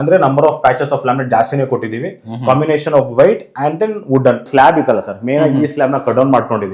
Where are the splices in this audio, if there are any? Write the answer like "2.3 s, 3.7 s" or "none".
4.5 s